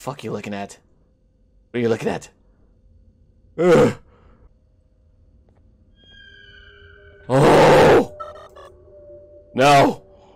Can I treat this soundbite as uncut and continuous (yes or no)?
no